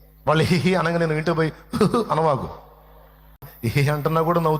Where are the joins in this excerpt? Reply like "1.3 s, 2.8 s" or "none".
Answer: 3.5 s